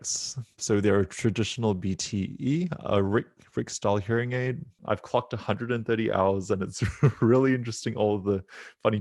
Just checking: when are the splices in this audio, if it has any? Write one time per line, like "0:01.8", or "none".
0:04.8